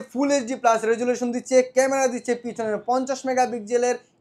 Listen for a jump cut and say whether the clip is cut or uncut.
uncut